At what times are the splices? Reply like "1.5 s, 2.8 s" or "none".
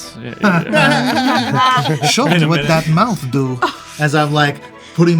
2.0 s